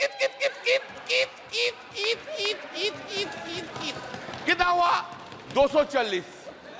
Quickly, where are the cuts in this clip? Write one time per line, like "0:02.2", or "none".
none